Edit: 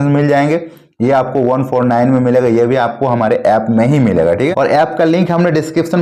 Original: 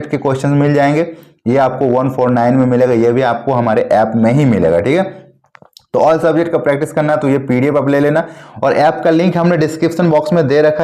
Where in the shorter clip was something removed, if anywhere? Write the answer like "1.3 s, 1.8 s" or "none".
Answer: 4.5 s